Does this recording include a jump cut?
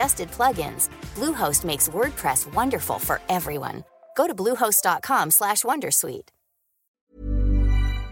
yes; 1 cut; at 6.9 s

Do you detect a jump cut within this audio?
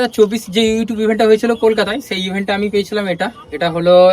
no; 0 cuts

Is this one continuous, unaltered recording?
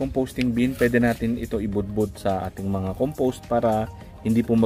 yes; 0 cuts

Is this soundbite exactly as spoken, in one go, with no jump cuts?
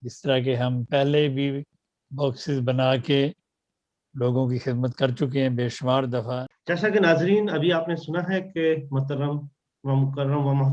no; 1 cut; at 6.5 s

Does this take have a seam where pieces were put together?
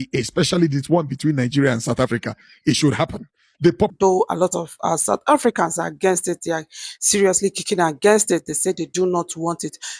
yes; 1 cut; at 3.9 s

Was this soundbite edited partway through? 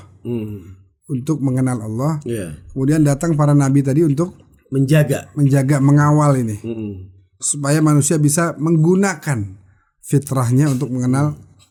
no; 0 cuts

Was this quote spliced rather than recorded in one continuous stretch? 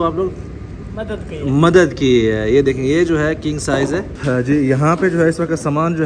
yes; 1 cut; at 4.1 s

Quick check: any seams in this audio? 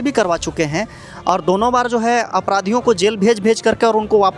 no; 0 cuts

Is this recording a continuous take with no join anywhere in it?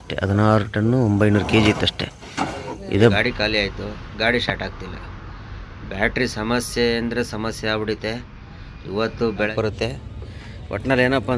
no; 2 cuts; at 3.1 s, 9.5 s

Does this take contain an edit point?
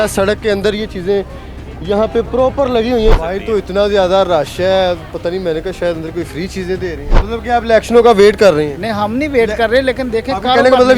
yes; 2 cuts; at 3.1 s, 7.1 s

